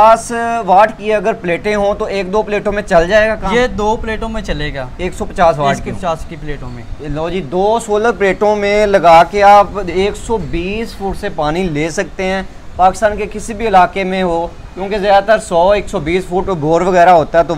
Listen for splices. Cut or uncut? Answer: uncut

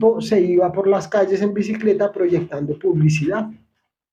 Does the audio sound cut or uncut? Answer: uncut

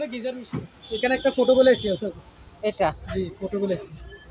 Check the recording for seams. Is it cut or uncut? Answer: cut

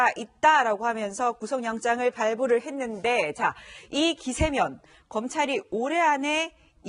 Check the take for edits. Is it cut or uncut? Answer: uncut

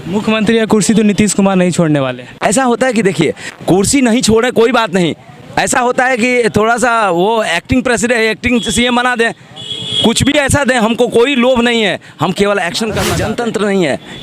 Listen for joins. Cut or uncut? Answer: cut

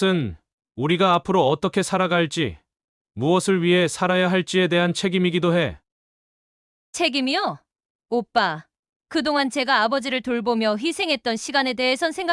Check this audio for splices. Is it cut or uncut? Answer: uncut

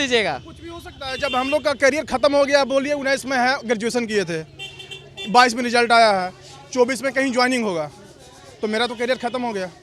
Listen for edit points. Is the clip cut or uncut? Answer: uncut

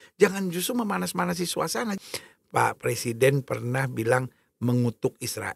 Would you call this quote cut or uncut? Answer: cut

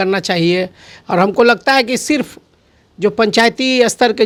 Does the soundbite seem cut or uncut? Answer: uncut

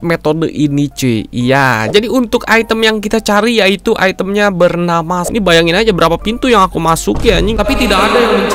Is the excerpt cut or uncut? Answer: cut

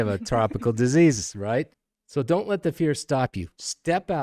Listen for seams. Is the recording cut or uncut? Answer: cut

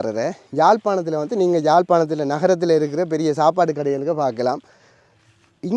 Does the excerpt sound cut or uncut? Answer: uncut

